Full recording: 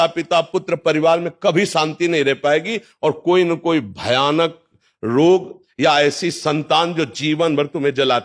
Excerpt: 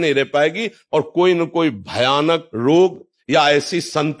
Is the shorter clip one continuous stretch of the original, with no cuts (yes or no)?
no